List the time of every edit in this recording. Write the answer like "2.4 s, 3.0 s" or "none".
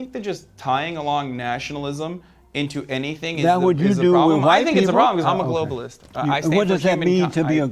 none